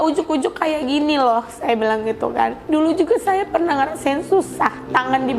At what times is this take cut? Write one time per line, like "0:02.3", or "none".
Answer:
0:02.6